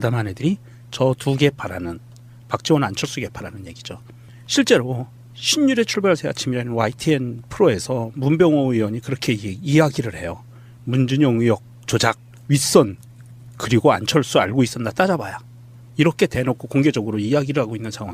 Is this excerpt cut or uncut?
uncut